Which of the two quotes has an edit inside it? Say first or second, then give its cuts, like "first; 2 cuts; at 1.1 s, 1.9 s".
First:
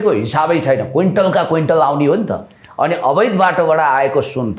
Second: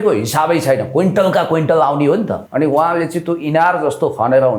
second; 1 cut; at 2.4 s